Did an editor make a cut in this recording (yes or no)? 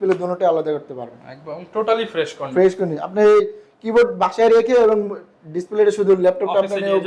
no